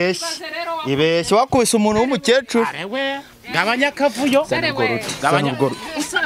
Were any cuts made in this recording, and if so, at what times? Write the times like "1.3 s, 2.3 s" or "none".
none